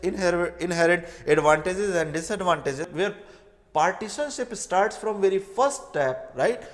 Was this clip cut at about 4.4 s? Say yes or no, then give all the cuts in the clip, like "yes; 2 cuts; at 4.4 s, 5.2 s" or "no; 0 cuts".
no; 1 cut; at 2.9 s